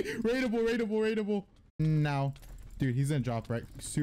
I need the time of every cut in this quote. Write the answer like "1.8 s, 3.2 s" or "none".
1.8 s